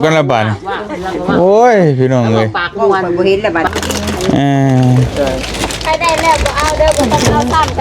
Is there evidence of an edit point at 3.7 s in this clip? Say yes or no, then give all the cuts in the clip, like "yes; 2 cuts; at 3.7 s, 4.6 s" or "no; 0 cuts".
yes; 1 cut; at 3.7 s